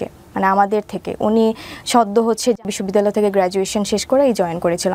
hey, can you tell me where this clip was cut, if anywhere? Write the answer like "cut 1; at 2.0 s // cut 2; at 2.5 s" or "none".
cut 1; at 2.7 s